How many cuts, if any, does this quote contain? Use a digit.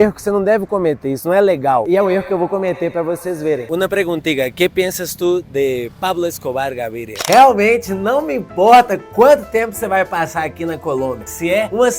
3